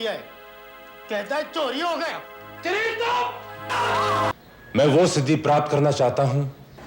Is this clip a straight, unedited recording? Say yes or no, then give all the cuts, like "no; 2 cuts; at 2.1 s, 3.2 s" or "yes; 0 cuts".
no; 1 cut; at 4.3 s